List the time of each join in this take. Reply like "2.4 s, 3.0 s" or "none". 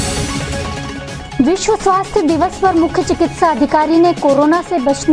none